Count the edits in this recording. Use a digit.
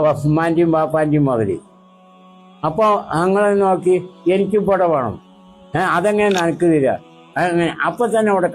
0